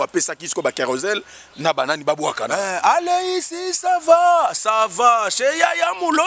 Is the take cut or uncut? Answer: uncut